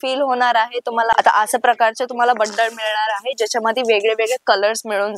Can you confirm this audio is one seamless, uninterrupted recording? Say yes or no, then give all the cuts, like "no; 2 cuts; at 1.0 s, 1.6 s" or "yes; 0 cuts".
no; 1 cut; at 1.1 s